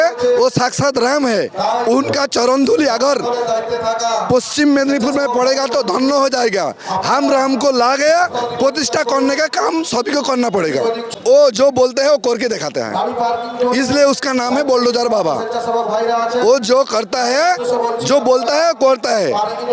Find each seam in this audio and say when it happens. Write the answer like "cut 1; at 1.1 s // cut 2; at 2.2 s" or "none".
cut 1; at 11.0 s